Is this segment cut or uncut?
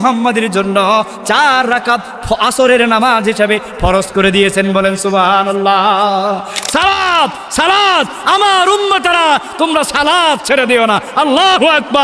cut